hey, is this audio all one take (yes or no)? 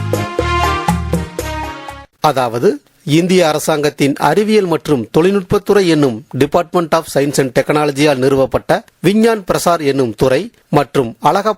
no